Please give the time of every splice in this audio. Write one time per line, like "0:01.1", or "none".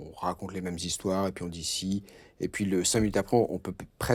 none